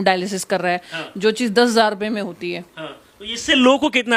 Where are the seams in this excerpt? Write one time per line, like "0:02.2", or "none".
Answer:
none